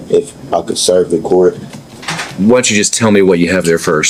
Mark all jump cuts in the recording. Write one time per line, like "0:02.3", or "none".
none